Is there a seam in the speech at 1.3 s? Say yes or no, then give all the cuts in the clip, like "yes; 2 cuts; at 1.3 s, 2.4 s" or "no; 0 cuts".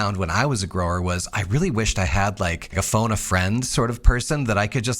no; 1 cut; at 2.6 s